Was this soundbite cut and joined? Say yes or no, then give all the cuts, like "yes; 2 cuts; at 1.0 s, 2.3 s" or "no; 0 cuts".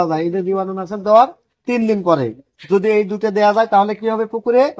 no; 0 cuts